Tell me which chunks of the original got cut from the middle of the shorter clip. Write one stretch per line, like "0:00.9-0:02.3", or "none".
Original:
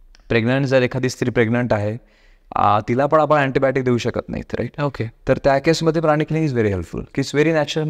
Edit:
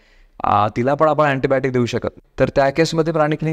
0:04.3-0:05.1